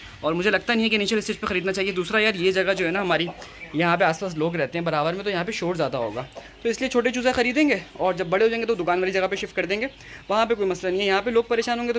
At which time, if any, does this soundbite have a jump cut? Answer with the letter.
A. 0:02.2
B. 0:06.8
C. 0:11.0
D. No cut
D